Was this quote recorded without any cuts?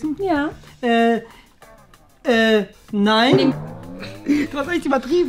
no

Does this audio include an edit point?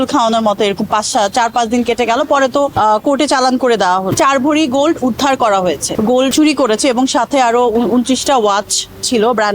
yes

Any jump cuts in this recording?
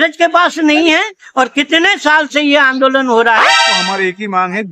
yes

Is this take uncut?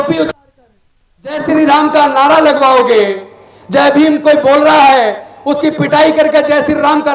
yes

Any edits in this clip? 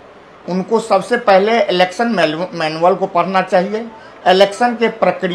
no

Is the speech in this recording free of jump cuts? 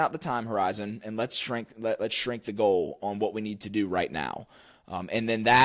yes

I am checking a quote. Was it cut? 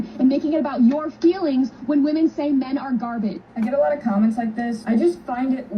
yes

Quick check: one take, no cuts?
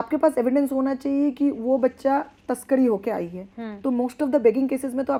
yes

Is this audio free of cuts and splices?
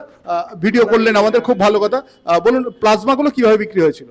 yes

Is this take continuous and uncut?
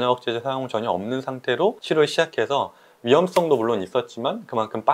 no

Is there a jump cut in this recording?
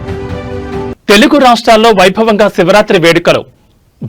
no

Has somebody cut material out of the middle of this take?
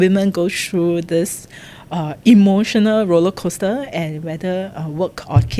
no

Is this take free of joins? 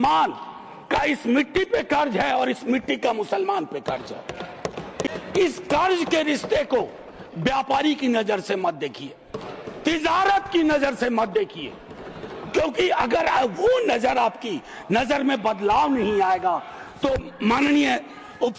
yes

